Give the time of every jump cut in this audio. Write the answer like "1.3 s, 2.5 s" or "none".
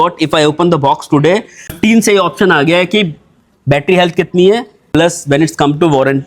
1.8 s, 4.8 s